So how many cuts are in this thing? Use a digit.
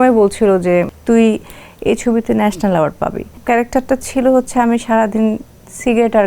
2